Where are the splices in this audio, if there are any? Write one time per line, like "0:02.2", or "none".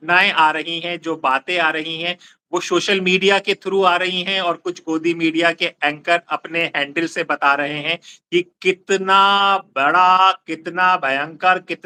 none

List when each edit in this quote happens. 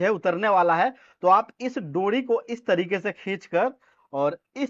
none

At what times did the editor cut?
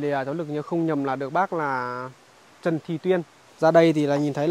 0:03.4

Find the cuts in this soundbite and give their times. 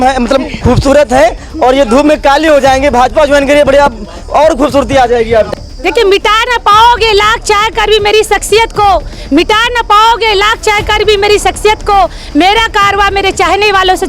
0:05.5

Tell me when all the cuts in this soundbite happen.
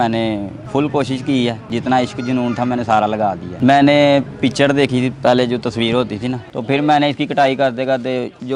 0:06.4

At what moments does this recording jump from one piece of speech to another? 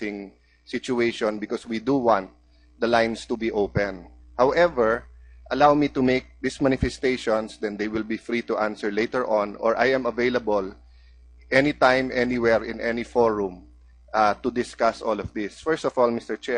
none

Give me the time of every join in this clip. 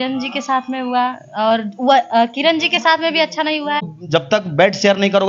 0:03.8

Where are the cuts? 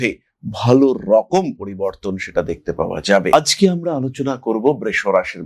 none

